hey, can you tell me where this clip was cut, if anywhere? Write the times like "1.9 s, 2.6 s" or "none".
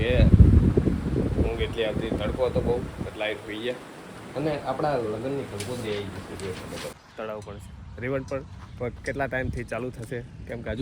6.9 s